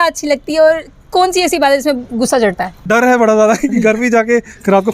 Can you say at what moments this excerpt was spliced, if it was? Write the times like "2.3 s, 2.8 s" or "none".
2.8 s